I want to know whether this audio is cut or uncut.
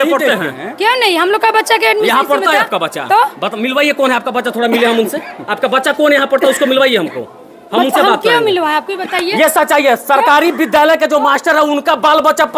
uncut